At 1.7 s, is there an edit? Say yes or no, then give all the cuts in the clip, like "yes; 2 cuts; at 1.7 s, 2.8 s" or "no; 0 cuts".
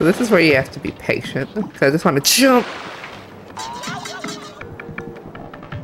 yes; 1 cut; at 1.7 s